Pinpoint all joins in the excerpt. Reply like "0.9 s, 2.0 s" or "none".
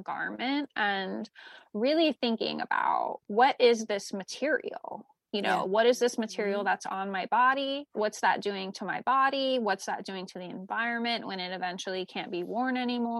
none